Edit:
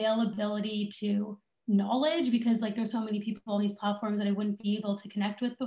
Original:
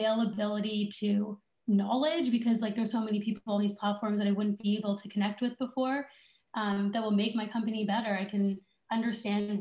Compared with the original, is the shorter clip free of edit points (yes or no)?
yes